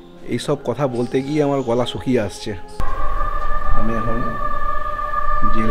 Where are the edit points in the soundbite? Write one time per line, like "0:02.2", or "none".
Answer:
0:02.8